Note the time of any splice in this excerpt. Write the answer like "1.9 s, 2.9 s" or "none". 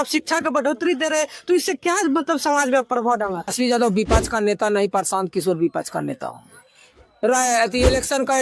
3.5 s, 7.1 s